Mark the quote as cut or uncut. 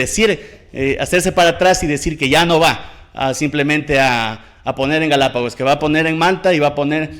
uncut